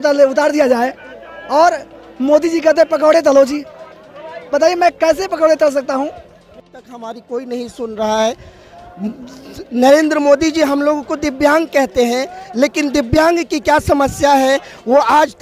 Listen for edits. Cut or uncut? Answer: cut